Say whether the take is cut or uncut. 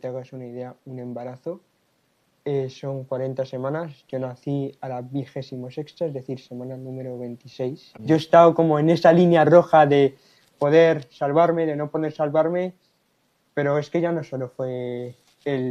cut